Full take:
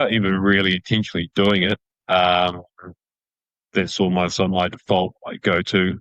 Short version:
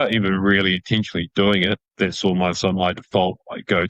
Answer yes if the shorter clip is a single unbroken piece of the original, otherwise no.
no